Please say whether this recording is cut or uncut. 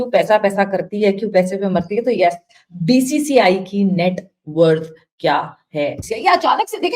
uncut